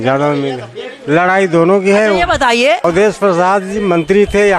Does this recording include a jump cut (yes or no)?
yes